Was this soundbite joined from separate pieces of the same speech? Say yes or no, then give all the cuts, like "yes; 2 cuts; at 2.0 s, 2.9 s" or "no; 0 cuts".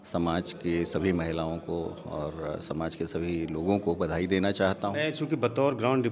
yes; 1 cut; at 4.9 s